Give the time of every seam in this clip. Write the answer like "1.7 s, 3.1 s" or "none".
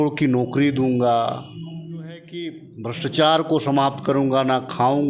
2.7 s